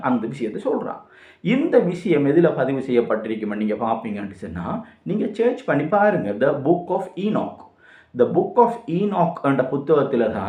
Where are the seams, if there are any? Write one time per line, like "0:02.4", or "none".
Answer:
none